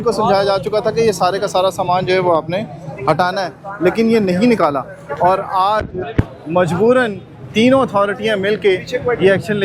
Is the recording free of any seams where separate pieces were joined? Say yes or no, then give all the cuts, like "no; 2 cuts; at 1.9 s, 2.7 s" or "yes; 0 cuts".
yes; 0 cuts